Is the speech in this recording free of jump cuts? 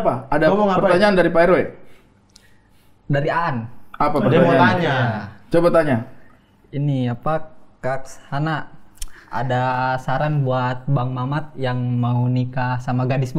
yes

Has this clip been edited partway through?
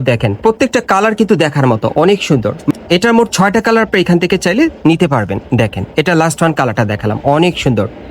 yes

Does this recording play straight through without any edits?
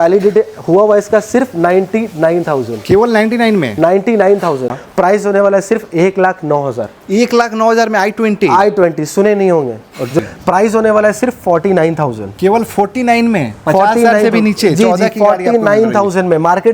no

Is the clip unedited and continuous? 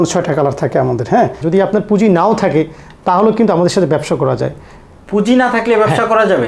no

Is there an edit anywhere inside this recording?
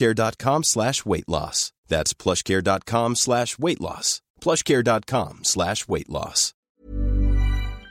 yes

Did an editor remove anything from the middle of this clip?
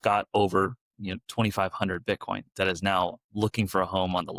no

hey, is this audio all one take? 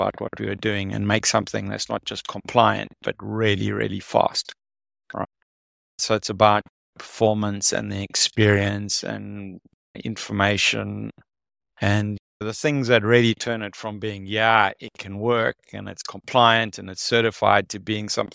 yes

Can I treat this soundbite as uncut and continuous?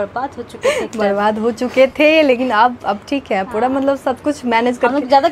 yes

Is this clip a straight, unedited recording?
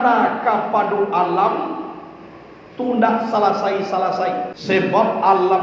no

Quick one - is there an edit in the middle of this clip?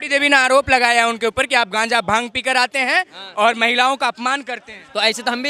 no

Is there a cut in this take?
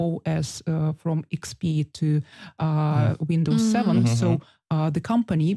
no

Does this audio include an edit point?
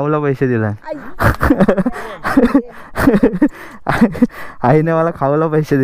no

